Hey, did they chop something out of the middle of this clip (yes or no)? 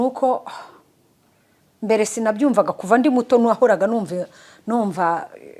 no